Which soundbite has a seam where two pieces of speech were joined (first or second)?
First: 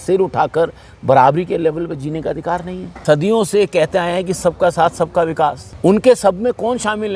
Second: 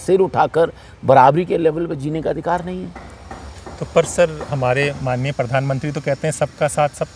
first